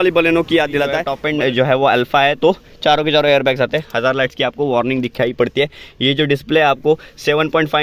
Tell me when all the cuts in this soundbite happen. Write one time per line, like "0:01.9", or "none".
0:01.1